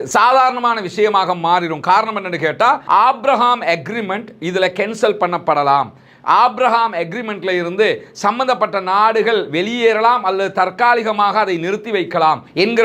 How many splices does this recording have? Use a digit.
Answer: 1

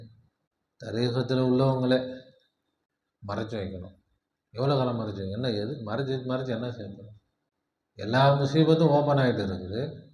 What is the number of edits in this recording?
0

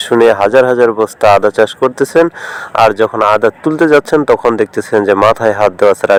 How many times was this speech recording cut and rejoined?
0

